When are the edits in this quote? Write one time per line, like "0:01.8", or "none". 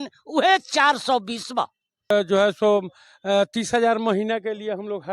0:02.1